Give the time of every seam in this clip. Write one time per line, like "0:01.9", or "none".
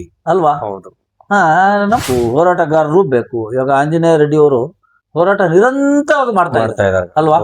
0:02.0